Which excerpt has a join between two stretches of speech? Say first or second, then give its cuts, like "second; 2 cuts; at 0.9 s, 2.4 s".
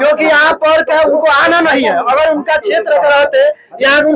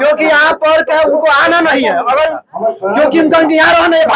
second; 1 cut; at 2.4 s